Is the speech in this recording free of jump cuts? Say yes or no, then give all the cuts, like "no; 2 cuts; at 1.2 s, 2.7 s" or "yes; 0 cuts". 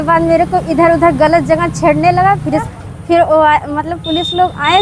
no; 1 cut; at 2.7 s